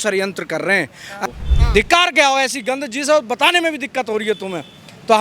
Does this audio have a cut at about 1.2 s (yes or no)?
yes